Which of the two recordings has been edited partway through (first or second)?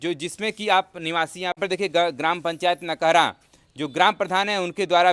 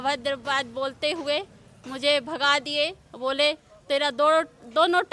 first